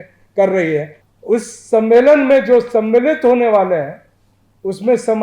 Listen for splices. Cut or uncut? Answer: cut